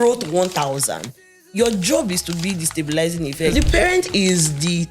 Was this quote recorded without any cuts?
no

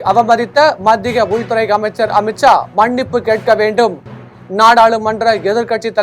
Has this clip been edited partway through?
no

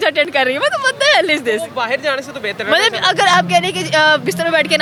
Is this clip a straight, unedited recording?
yes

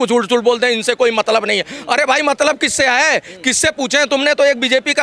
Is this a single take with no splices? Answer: yes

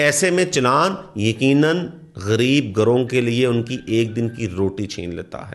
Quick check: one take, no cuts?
yes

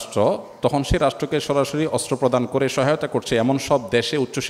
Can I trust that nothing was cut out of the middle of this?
yes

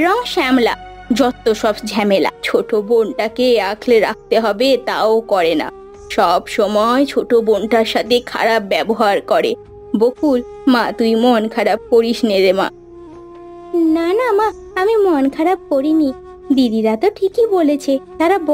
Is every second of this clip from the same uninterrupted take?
no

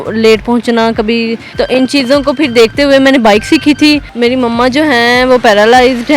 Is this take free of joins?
no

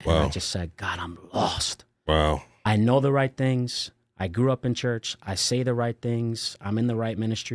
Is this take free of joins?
yes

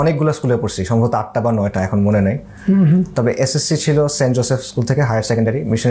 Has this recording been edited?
no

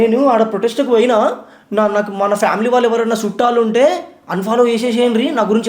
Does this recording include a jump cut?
no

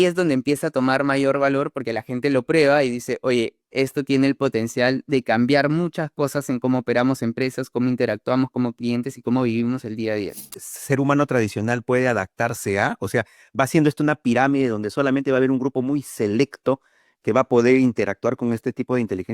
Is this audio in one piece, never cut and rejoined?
no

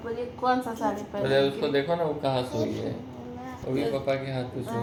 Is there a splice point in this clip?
no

